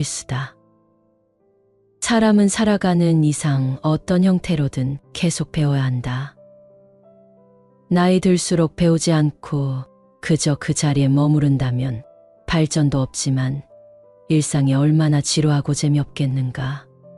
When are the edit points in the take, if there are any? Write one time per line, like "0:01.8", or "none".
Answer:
none